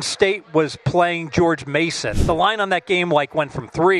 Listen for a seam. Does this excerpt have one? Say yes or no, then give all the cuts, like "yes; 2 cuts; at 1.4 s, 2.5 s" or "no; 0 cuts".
yes; 1 cut; at 2.1 s